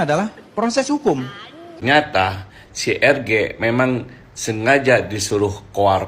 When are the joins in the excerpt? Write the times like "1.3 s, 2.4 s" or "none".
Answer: 1.9 s